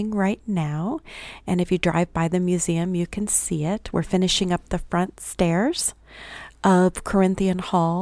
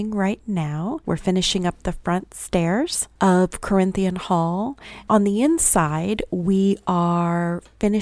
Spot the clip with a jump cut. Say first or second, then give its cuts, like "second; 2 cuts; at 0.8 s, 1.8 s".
second; 3 cuts; at 1.0 s, 3.0 s, 4.9 s